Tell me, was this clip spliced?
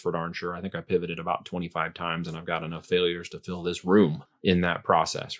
yes; 1 cut; at 4.3 s

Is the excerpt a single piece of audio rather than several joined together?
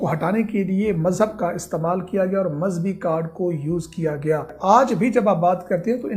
no; 1 cut; at 4.5 s

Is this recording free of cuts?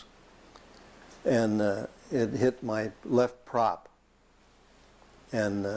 yes; 0 cuts

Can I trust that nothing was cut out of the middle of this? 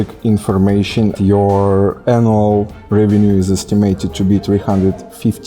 no; 1 cut; at 1.2 s

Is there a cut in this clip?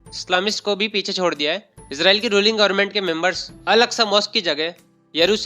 yes; 2 cuts; at 1.8 s, 3.5 s

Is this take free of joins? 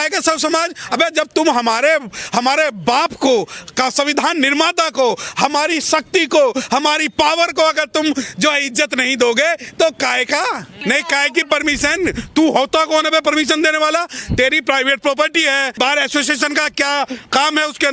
no; 2 cuts; at 10.7 s, 15.7 s

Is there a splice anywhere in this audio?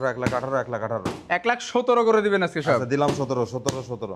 no; 0 cuts

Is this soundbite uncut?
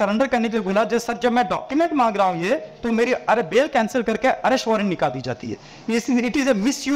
yes; 0 cuts

